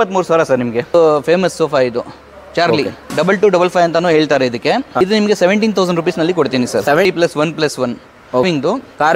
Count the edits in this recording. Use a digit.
5